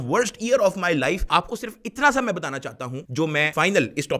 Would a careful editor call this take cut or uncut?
cut